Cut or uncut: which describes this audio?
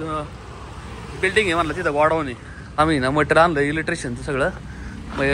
cut